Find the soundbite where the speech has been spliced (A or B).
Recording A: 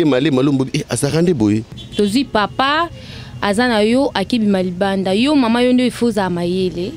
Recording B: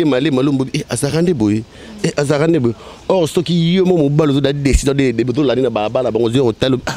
A